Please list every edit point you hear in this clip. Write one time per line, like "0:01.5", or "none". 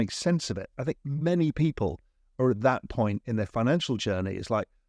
none